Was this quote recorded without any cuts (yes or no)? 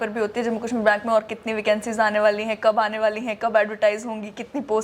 yes